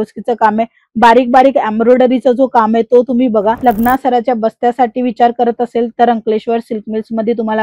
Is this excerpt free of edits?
no; 1 cut; at 3.6 s

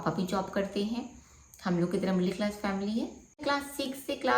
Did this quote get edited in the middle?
yes; 1 cut; at 3.4 s

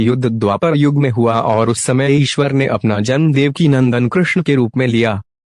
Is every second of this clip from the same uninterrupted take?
no; 1 cut; at 4.4 s

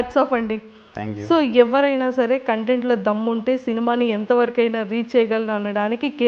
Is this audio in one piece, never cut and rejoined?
yes; 0 cuts

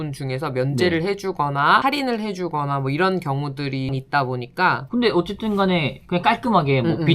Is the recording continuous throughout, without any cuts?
no; 1 cut; at 4.8 s

